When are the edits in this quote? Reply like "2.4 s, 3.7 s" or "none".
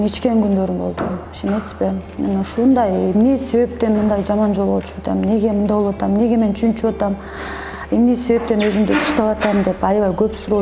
none